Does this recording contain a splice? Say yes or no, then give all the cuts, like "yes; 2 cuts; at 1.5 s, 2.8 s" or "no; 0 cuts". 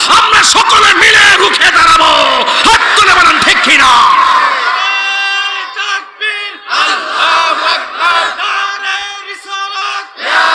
no; 0 cuts